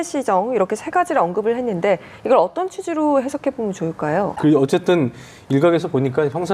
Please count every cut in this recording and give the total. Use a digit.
1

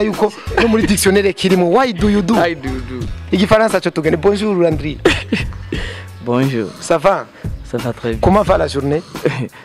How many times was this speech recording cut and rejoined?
1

